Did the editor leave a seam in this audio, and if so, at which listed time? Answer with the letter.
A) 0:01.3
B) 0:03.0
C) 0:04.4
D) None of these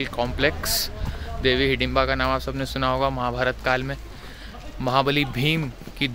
D